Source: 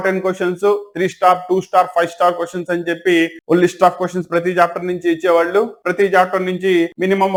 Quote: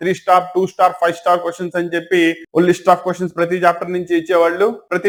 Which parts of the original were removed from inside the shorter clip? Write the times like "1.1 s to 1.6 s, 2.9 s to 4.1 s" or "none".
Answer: none